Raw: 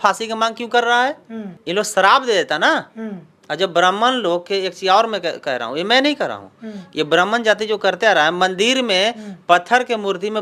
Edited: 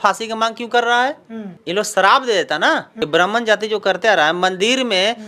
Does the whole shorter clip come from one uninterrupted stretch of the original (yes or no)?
no